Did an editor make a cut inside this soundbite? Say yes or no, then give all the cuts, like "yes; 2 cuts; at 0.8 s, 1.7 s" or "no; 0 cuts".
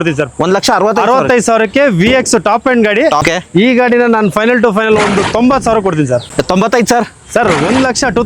yes; 2 cuts; at 3.2 s, 6.2 s